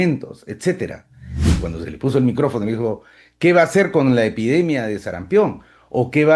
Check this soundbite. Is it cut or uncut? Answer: cut